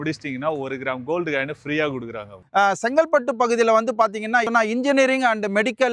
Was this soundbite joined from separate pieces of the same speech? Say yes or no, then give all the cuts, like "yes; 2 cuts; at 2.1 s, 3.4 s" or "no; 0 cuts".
yes; 2 cuts; at 2.5 s, 4.5 s